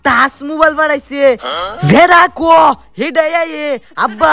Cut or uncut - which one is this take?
uncut